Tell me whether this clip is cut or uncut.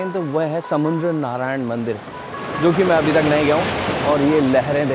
uncut